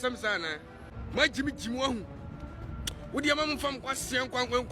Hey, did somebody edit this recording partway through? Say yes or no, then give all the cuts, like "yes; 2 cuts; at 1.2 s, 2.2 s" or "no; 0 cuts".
yes; 1 cut; at 0.9 s